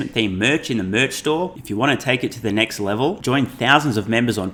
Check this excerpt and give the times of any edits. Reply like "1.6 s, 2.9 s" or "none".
none